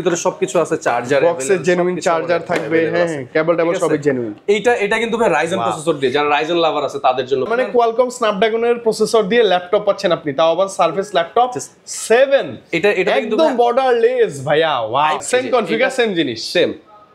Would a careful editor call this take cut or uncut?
cut